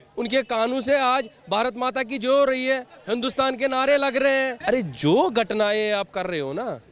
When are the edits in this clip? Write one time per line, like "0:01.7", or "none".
0:04.6